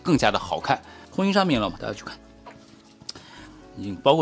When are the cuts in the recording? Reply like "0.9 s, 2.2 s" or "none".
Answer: 1.0 s